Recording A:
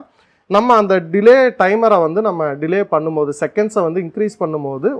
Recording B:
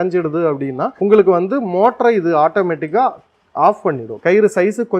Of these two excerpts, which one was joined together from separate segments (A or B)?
B